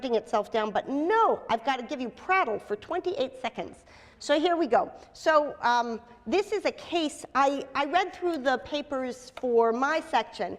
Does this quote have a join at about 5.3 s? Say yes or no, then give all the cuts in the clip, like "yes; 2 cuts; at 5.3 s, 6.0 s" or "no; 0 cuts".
yes; 1 cut; at 5.3 s